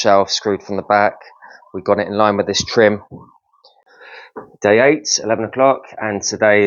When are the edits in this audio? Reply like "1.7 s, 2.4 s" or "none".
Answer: 4.0 s